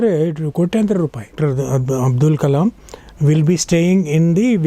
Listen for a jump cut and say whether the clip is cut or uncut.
cut